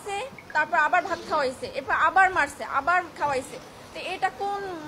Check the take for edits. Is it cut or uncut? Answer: uncut